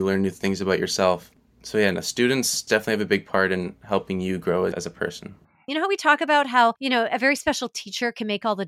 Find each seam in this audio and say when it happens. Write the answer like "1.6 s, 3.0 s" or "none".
1.3 s, 2.6 s, 5.7 s